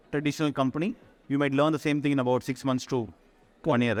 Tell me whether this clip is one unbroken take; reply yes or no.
yes